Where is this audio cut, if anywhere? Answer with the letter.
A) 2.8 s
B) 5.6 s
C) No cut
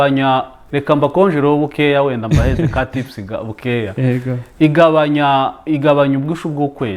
C